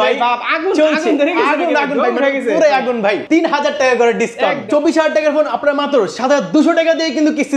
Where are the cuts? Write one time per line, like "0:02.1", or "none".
0:03.2
0:04.6